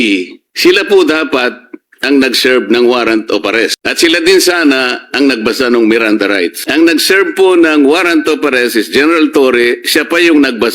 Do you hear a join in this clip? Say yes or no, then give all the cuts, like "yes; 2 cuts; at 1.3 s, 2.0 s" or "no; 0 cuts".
yes; 2 cuts; at 3.8 s, 6.6 s